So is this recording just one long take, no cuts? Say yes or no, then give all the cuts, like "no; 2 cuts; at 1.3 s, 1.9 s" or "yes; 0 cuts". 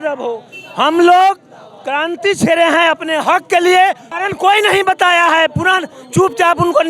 no; 1 cut; at 4.1 s